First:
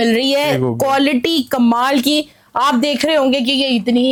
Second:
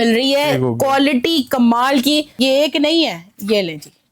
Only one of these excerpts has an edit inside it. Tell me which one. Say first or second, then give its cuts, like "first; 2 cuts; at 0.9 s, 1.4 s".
second; 1 cut; at 2.3 s